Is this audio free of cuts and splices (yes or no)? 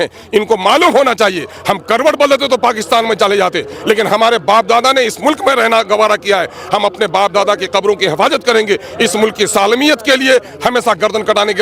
yes